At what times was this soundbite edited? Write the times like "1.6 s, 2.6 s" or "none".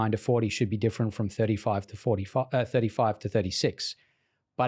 none